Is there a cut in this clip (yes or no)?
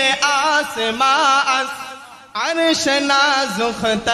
no